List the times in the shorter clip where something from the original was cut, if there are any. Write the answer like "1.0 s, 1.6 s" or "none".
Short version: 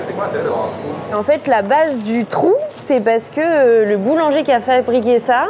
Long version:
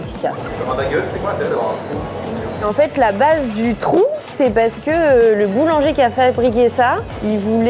1.1 s